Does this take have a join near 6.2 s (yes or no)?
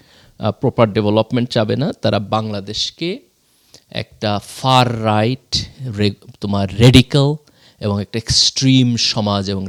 no